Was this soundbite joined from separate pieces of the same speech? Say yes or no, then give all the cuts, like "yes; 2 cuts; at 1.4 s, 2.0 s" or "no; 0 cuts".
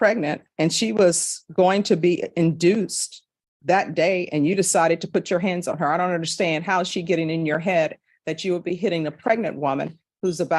no; 0 cuts